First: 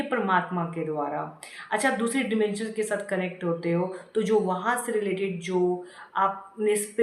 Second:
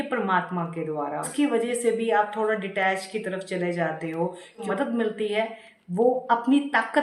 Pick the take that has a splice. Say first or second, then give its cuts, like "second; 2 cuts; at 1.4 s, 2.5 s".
second; 2 cuts; at 1.3 s, 4.6 s